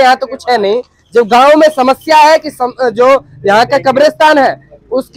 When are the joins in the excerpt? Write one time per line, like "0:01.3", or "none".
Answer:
none